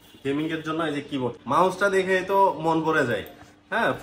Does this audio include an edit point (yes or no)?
yes